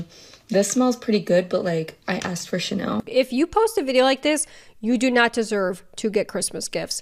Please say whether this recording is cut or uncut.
cut